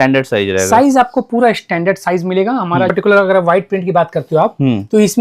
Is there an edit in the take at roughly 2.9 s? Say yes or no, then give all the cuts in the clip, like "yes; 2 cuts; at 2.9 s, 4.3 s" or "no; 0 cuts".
yes; 1 cut; at 2.9 s